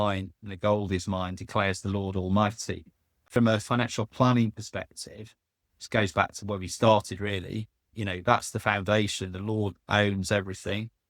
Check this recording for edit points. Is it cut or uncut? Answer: cut